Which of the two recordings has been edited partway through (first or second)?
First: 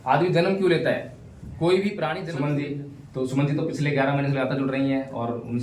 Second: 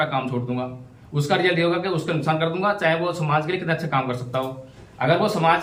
first